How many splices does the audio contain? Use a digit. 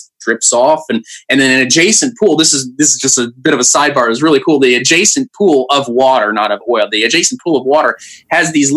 0